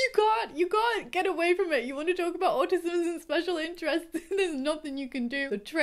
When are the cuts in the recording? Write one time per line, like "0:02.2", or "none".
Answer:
none